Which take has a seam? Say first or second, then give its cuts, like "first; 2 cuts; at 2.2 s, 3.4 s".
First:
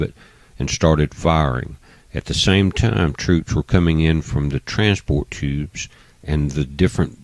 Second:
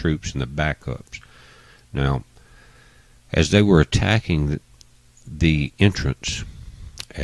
first; 1 cut; at 3.5 s